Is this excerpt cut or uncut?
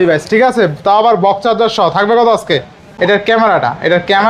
cut